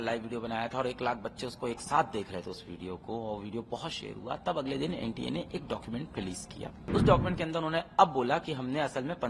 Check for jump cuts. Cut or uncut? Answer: cut